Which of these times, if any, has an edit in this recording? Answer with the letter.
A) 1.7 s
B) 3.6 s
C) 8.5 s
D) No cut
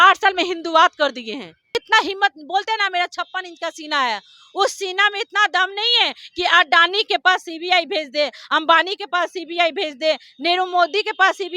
A